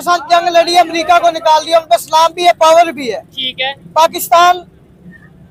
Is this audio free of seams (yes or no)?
yes